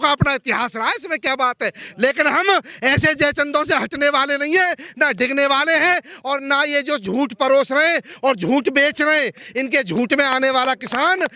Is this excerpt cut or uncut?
uncut